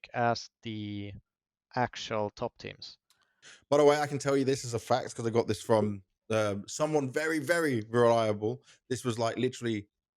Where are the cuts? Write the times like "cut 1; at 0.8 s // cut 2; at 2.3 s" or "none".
cut 1; at 3.4 s